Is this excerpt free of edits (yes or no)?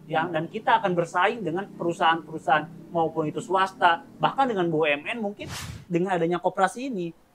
no